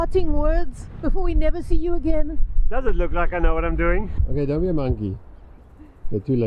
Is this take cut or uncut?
cut